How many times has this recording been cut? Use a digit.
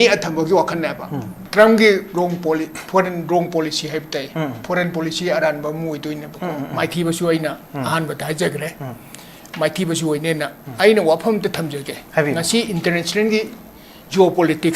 1